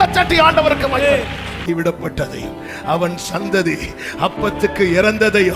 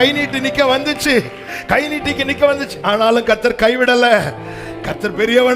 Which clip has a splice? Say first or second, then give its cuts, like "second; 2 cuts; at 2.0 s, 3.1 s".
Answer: first; 1 cut; at 1.6 s